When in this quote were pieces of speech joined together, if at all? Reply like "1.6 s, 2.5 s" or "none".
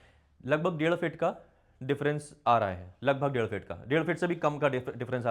none